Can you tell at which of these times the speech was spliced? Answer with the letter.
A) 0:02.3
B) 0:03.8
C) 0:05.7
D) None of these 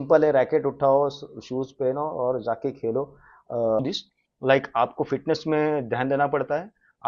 B